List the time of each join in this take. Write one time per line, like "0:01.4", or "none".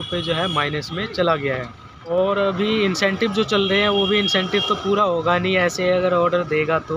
0:02.2